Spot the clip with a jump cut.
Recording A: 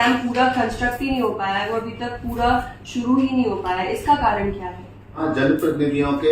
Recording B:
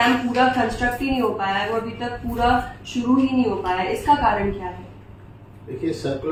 A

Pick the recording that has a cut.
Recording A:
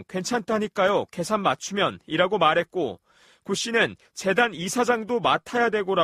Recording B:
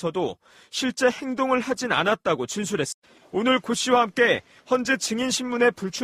B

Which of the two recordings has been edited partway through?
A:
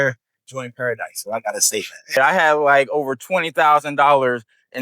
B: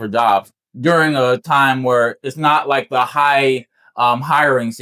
A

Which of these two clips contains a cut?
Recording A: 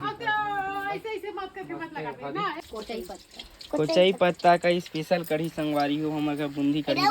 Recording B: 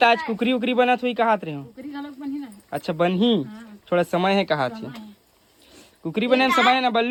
A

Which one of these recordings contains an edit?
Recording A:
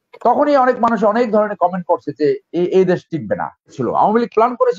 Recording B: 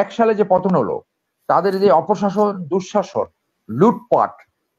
A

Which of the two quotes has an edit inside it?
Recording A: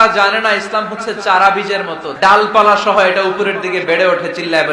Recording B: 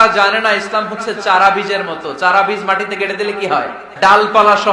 A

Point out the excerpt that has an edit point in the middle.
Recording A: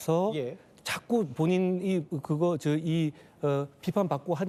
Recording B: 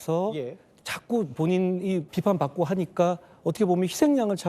B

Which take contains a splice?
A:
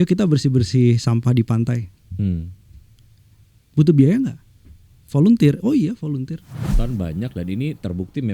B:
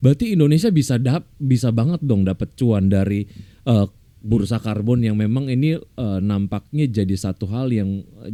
A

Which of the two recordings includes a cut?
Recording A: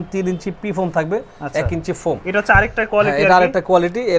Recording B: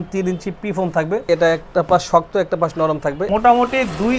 B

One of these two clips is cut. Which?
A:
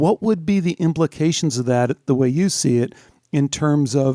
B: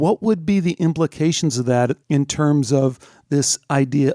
B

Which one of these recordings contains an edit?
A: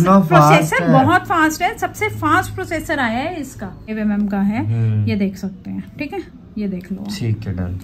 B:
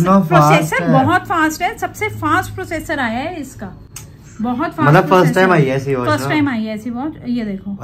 A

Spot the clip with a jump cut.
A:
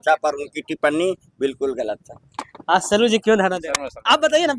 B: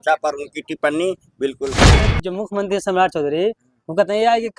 B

